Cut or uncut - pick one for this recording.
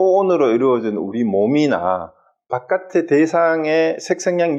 uncut